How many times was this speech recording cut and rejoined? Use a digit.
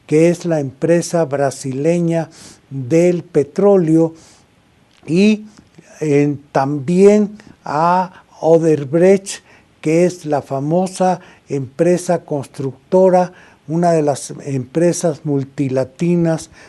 1